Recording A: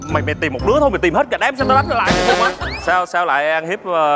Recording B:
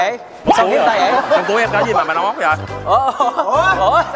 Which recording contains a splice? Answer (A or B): A